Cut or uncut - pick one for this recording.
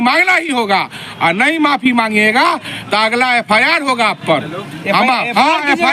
uncut